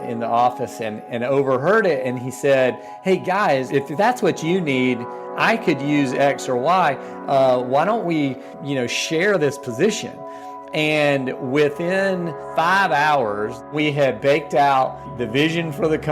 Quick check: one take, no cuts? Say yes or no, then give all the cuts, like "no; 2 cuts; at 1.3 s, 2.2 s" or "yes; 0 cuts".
no; 5 cuts; at 3.7 s, 8.5 s, 12.4 s, 13.7 s, 15.1 s